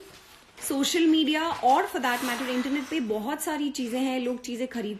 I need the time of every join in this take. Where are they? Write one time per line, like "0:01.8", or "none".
none